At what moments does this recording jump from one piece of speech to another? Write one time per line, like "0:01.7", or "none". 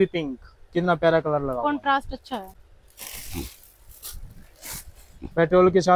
none